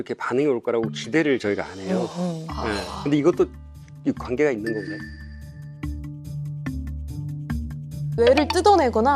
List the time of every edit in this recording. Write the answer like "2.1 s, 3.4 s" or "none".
8.0 s